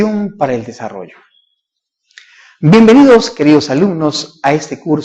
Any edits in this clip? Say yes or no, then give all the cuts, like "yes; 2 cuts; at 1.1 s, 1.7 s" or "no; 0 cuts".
no; 0 cuts